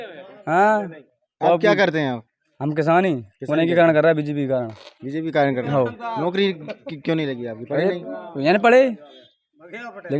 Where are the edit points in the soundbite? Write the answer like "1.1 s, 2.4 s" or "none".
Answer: none

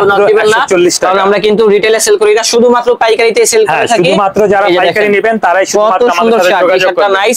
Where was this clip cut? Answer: none

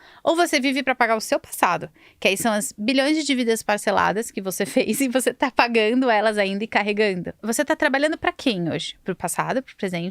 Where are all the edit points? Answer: 7.4 s, 9.2 s

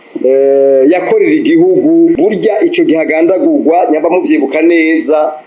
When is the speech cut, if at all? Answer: none

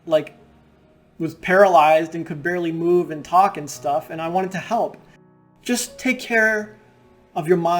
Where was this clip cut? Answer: 5.1 s

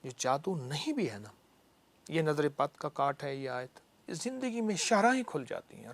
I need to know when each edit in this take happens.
4.1 s

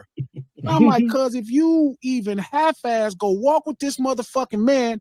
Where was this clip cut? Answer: none

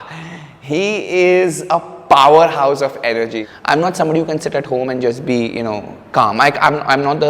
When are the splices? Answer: 3.4 s

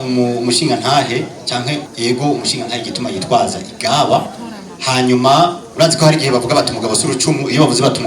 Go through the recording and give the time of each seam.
1.9 s, 5.6 s

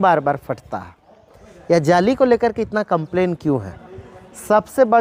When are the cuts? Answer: none

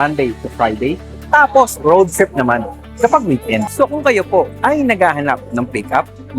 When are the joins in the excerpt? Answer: 3.7 s

